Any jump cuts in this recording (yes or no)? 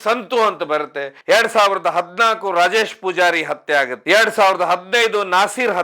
yes